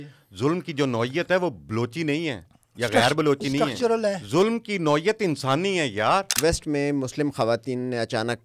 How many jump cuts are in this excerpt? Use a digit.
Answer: 1